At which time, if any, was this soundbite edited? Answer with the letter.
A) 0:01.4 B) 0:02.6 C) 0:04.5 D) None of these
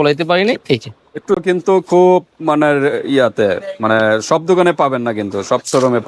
A